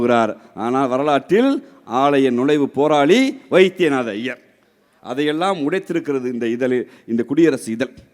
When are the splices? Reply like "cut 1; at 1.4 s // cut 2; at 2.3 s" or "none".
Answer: none